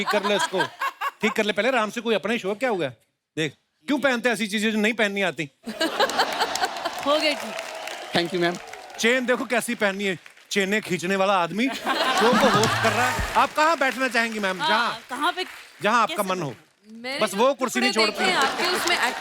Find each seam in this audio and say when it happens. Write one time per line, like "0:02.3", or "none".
0:13.2